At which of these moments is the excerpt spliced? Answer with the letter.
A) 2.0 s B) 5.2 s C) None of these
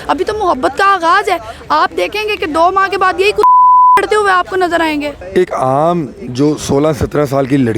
B